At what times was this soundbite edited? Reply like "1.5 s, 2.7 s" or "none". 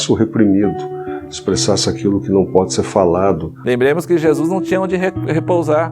3.6 s